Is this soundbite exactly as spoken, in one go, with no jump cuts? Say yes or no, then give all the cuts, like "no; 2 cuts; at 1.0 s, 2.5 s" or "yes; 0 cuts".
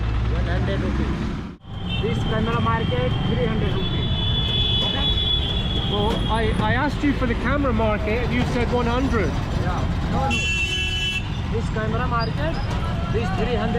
no; 1 cut; at 1.5 s